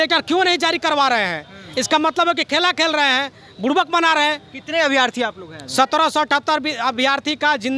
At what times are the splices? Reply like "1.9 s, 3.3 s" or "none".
none

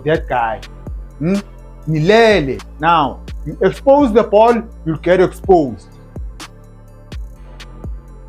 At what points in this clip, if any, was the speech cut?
2.7 s

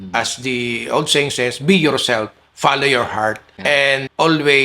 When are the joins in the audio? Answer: 3.5 s

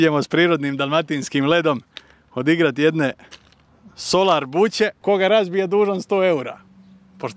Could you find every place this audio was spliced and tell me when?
5.0 s

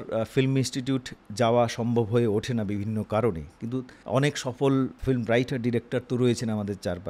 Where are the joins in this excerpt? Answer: 3.9 s, 5.0 s

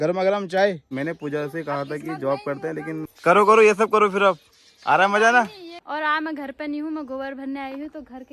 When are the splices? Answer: 0.9 s, 3.1 s, 5.7 s

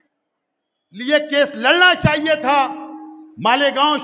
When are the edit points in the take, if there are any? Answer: none

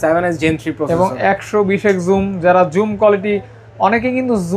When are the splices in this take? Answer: none

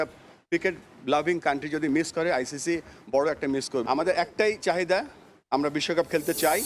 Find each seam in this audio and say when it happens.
3.8 s

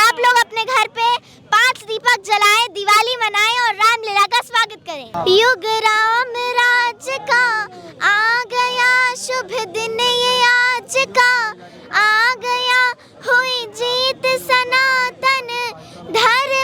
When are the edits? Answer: 5.1 s

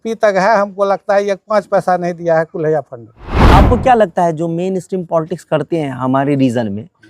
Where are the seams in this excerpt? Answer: 3.3 s

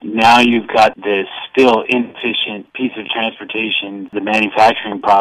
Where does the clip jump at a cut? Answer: 1.0 s, 2.7 s, 4.1 s

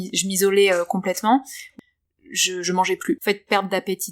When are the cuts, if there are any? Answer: 1.7 s, 3.2 s

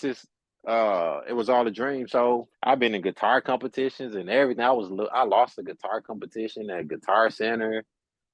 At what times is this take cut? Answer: 2.5 s

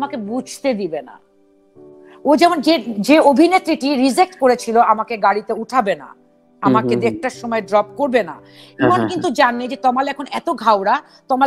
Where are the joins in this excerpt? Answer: none

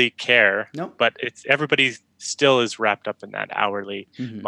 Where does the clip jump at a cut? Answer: none

